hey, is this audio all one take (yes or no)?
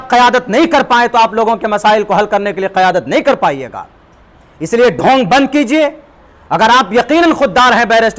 yes